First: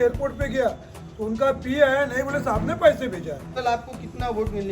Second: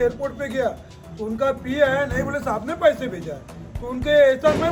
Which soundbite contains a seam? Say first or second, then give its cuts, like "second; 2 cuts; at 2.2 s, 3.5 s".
first; 1 cut; at 3.5 s